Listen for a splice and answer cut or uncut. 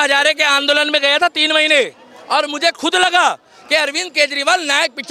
uncut